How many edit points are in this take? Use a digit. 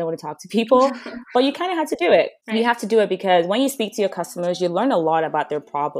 1